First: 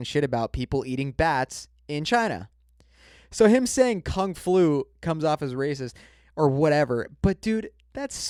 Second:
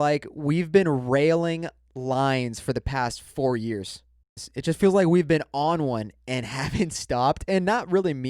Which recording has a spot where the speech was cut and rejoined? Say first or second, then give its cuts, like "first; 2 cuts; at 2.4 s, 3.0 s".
second; 1 cut; at 4.5 s